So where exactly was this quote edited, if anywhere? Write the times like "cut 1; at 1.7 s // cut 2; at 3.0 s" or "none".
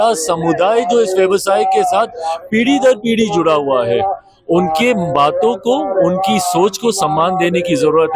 none